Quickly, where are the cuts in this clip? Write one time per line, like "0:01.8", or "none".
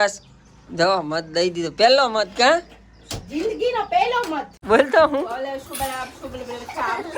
0:04.5